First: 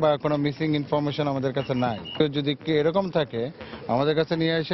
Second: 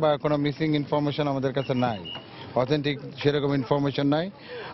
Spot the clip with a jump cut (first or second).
first